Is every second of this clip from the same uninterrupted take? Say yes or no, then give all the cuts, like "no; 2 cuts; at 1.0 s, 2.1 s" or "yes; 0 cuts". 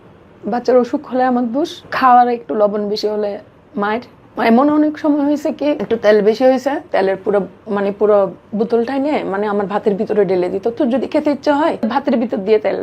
no; 5 cuts; at 1.8 s, 4.2 s, 5.8 s, 6.8 s, 11.9 s